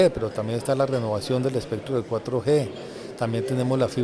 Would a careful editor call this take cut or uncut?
uncut